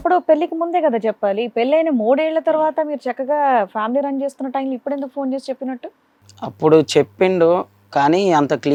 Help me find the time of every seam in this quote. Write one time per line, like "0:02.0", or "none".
none

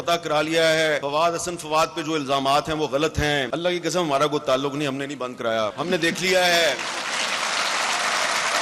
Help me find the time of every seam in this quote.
0:01.0
0:03.5
0:05.8

